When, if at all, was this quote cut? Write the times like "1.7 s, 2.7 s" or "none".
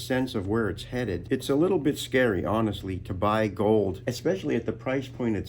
1.2 s, 4.1 s

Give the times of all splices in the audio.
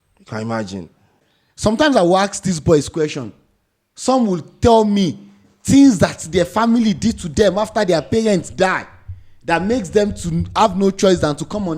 1.1 s

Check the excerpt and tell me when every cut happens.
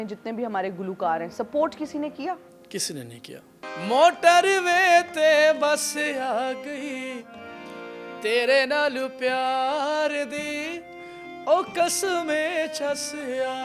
3.6 s

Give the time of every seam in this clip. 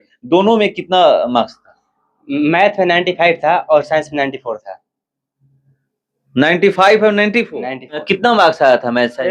8.0 s

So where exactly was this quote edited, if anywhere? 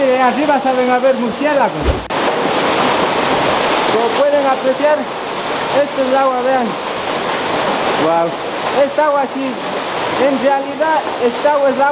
2.1 s

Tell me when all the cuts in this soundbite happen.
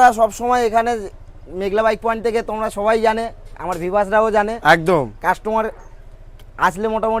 none

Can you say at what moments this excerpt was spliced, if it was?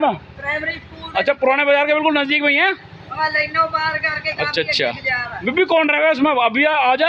none

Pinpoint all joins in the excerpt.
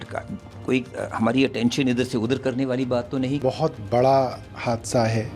none

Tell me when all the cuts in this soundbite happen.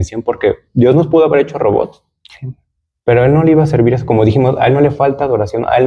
none

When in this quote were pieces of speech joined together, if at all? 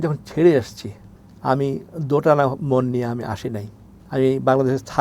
none

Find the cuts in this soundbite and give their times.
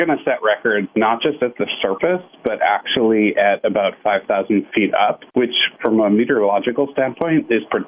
5.2 s

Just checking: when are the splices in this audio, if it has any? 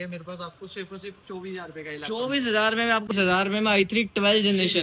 3.1 s

